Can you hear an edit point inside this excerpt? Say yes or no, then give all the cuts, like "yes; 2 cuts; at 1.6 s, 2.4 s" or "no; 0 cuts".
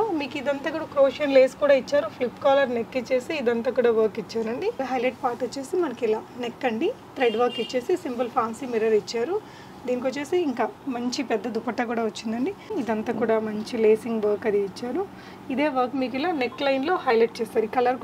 yes; 2 cuts; at 4.8 s, 12.7 s